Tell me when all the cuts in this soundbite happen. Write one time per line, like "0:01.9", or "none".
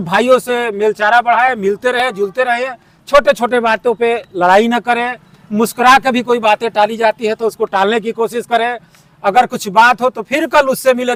none